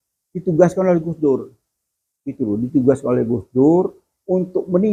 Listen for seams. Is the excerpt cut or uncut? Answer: uncut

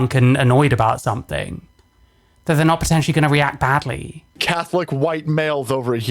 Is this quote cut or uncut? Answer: cut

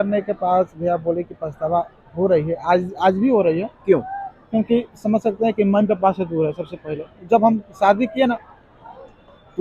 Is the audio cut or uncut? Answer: uncut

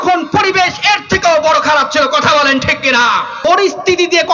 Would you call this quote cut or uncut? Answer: cut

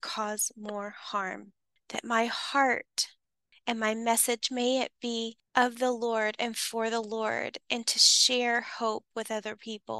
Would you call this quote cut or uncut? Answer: cut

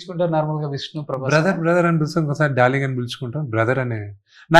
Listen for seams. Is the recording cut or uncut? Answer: uncut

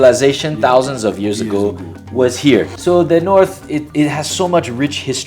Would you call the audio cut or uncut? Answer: cut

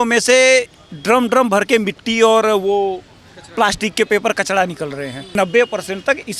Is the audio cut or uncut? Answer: cut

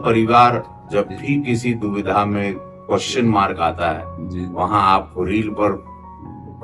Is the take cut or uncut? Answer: uncut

